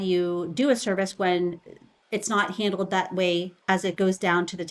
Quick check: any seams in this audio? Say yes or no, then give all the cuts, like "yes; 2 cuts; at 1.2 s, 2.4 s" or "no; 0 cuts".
yes; 1 cut; at 3.5 s